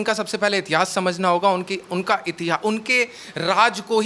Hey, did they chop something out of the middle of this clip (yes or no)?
no